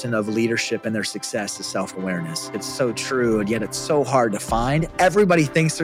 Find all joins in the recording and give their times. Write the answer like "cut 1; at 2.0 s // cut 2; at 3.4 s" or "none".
cut 1; at 2.6 s